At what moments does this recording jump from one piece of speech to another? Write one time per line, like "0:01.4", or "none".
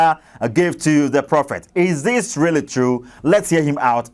none